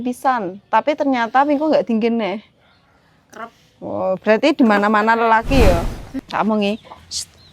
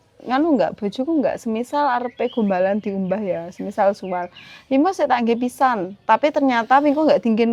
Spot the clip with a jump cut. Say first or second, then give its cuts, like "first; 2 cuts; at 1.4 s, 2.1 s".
first; 1 cut; at 6.1 s